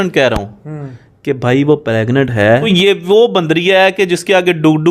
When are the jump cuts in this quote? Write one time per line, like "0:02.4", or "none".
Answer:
0:02.6